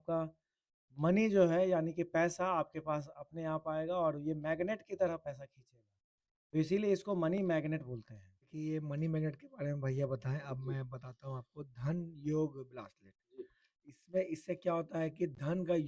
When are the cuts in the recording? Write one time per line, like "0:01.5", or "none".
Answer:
0:08.5